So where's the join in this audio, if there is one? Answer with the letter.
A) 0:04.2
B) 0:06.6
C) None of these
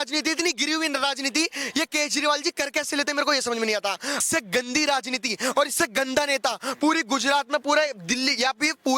A